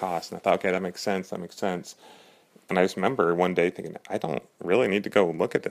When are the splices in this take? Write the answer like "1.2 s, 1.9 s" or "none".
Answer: none